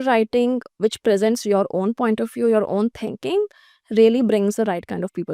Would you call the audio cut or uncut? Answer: uncut